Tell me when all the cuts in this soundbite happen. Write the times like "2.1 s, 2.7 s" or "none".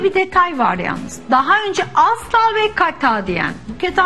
none